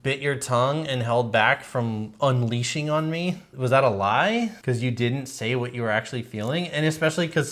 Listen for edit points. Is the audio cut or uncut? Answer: cut